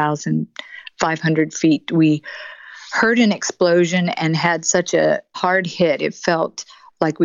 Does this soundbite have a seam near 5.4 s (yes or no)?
yes